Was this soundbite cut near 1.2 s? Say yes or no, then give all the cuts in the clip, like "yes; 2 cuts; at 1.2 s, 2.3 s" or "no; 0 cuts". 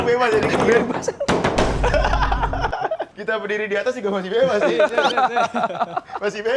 no; 1 cut; at 3.1 s